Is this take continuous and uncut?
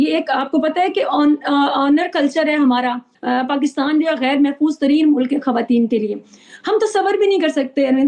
no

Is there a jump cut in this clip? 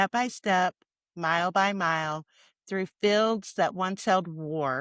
no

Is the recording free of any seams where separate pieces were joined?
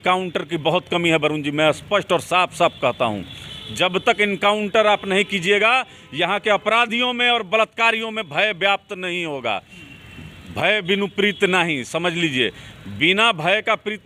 yes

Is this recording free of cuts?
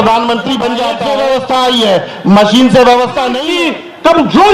no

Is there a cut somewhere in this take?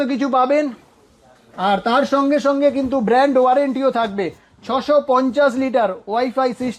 no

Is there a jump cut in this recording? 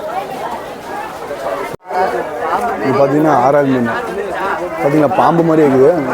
yes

